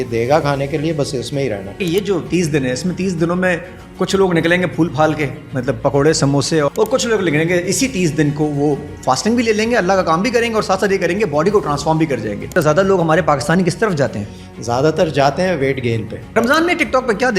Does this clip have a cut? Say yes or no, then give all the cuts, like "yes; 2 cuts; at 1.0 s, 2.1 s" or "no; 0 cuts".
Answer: yes; 4 cuts; at 1.8 s, 6.7 s, 12.5 s, 16.3 s